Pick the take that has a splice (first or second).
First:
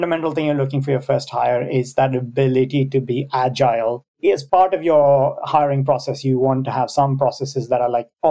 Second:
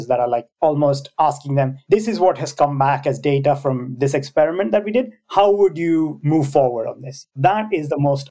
first